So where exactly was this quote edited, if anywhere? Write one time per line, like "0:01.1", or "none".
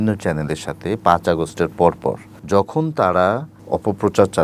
0:02.3
0:03.5